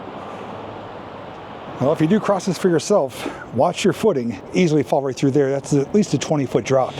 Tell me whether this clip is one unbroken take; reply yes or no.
no